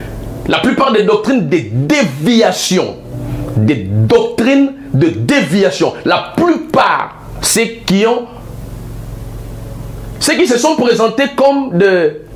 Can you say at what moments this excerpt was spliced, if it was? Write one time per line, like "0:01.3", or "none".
none